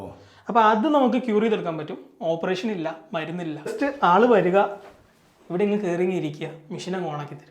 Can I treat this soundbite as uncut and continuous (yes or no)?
no